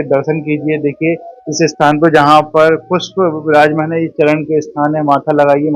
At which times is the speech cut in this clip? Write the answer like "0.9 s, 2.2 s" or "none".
none